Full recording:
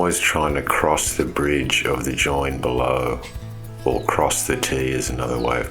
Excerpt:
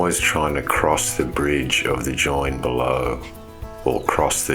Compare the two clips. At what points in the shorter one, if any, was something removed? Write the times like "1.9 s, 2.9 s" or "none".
none